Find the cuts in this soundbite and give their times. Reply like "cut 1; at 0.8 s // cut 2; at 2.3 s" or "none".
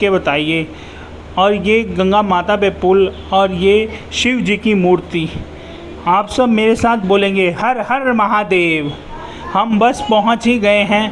none